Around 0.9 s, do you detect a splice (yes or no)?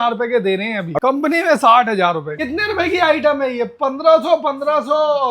yes